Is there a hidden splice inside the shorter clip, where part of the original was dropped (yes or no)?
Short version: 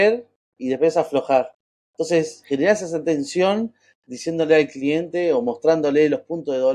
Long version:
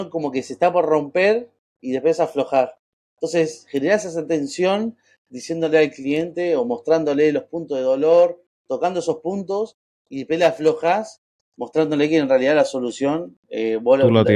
no